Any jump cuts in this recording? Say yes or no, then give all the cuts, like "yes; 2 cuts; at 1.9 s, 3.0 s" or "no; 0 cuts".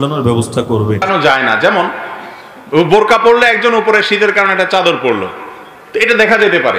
yes; 1 cut; at 1.1 s